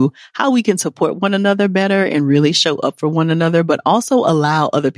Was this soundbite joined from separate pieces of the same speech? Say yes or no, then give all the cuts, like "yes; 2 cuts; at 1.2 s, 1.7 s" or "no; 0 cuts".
no; 0 cuts